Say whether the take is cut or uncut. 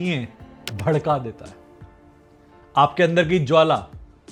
uncut